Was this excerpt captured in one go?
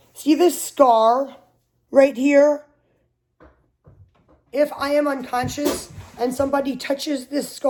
yes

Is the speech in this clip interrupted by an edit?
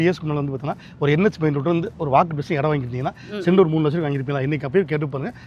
no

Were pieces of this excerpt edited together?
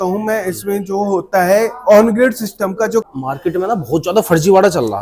yes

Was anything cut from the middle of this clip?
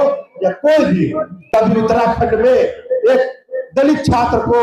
yes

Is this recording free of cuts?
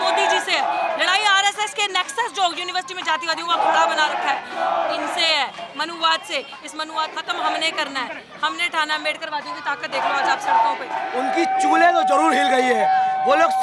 no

